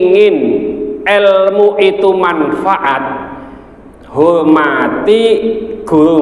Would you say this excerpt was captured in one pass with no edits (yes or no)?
yes